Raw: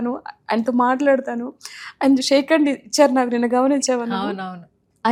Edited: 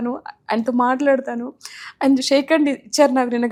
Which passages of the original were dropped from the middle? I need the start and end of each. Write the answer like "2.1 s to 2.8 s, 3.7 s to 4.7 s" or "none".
none